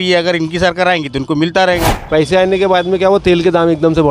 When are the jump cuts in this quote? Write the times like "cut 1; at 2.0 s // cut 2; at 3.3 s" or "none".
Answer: cut 1; at 1.9 s